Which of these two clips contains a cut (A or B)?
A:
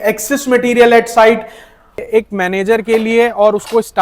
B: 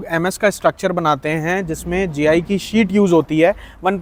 A